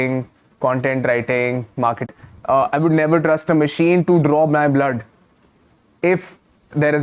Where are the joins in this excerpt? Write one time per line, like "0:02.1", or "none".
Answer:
0:02.1